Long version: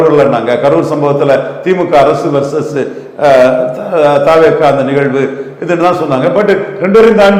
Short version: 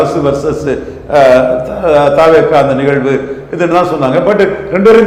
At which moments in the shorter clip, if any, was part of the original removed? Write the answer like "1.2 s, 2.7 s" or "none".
none